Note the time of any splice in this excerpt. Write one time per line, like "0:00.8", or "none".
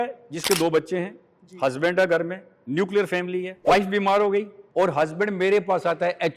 0:03.5
0:04.6